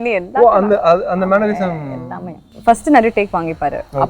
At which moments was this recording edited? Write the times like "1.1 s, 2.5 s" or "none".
2.4 s

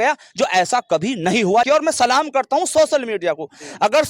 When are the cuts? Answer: 1.7 s

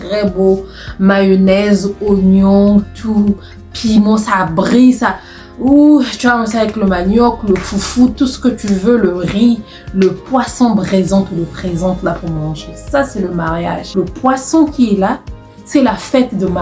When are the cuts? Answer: 13.8 s

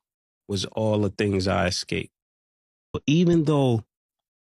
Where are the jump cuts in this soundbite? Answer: 3.0 s

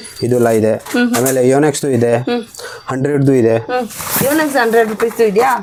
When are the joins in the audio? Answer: none

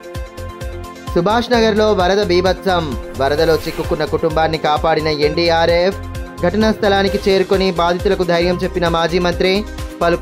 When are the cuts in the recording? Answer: none

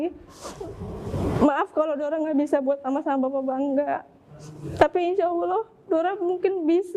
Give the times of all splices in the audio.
none

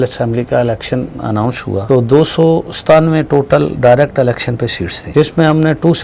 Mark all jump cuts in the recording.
1.8 s, 5.0 s

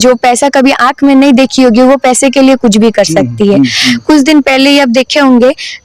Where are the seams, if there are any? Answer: 3.8 s

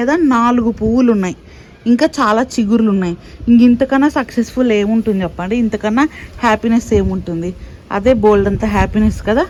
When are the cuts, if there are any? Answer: none

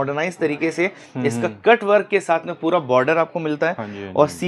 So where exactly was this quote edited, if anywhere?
none

